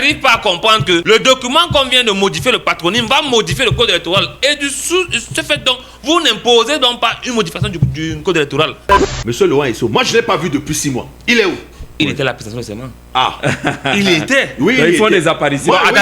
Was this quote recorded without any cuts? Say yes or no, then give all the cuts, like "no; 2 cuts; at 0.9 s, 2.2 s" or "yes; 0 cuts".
no; 2 cuts; at 1.0 s, 9.1 s